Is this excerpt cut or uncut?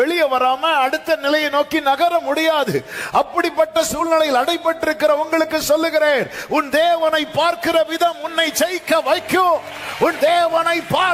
uncut